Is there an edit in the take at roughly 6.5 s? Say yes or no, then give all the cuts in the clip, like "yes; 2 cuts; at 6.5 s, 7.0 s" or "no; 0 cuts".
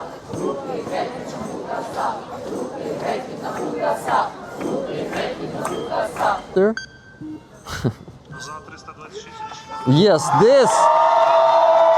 yes; 1 cut; at 6.5 s